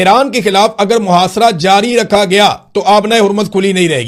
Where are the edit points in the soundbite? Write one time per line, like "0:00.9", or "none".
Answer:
none